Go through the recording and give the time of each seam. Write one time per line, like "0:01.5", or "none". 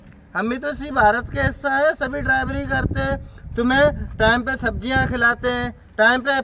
none